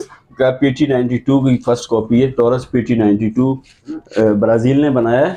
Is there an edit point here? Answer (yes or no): no